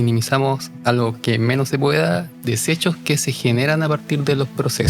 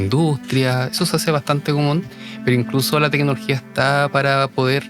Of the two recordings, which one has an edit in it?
first; 1 cut; at 2.3 s

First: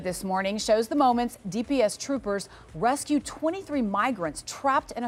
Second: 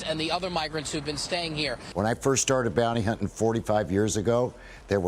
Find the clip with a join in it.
second; 1 cut; at 1.8 s

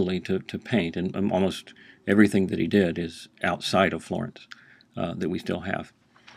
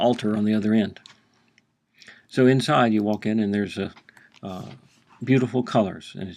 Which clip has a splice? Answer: second; 1 cut; at 3.2 s

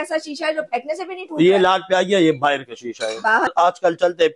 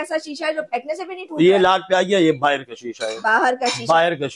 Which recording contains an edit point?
first; 1 cut; at 3.5 s

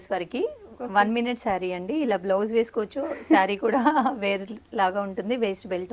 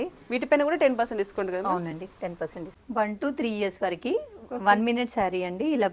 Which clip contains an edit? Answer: second; 1 cut; at 2.8 s

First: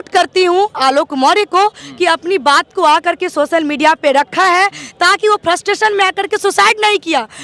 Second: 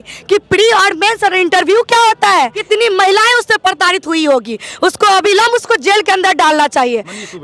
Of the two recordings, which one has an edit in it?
second; 1 cut; at 2.6 s

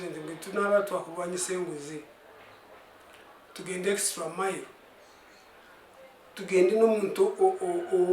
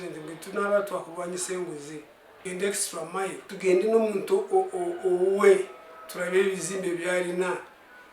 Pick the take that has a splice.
second; 2 cuts; at 2.2 s, 3.5 s

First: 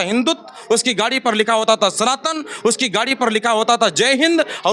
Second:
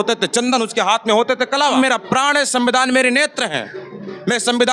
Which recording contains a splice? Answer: second; 1 cut; at 1.7 s

